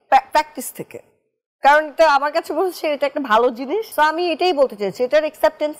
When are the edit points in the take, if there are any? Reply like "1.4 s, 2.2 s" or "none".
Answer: 3.9 s